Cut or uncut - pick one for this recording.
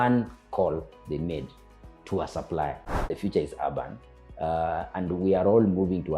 cut